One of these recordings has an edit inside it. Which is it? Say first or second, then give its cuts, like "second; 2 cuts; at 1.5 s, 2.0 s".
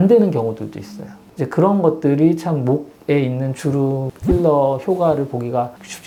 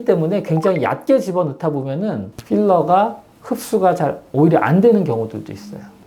second; 1 cut; at 2.3 s